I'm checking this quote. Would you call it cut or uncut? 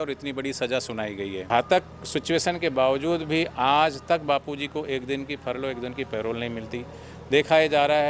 cut